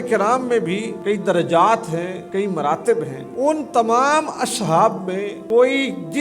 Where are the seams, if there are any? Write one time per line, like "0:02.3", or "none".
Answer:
0:00.9
0:02.2
0:03.2
0:05.3